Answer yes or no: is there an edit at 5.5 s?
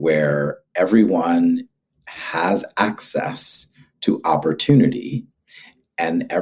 no